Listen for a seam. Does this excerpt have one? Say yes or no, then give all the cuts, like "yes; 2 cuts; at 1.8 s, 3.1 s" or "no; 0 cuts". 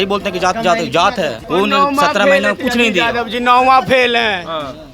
yes; 1 cut; at 1.4 s